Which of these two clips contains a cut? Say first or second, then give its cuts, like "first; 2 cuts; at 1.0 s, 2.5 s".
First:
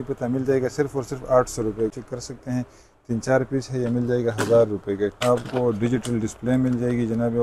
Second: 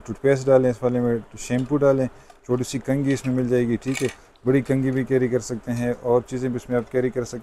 first; 2 cuts; at 1.9 s, 5.2 s